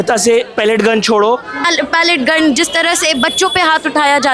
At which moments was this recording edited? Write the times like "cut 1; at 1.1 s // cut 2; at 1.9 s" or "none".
cut 1; at 1.6 s